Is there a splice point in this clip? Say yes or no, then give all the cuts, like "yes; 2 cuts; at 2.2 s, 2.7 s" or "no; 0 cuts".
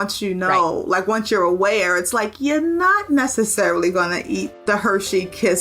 yes; 1 cut; at 4.5 s